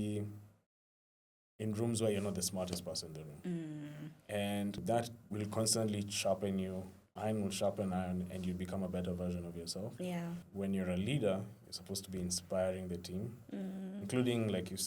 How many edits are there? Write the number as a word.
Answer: two